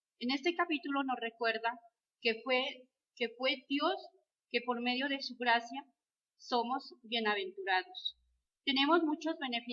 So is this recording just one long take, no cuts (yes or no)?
yes